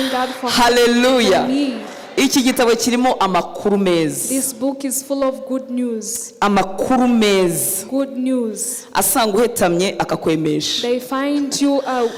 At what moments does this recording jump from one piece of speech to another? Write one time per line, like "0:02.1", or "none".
none